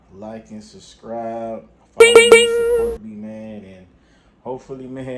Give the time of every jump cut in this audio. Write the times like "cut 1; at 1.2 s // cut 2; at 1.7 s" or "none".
cut 1; at 1.8 s // cut 2; at 2.9 s